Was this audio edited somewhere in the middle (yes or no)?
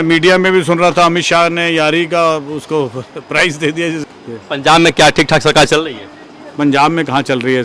yes